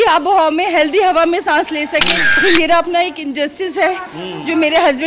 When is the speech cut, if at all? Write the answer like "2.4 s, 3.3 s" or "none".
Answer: 2.4 s